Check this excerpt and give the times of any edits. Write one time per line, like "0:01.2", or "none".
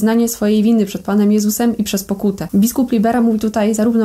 none